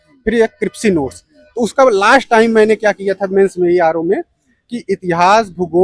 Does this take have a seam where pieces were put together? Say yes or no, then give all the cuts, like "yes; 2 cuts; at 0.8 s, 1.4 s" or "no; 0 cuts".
no; 0 cuts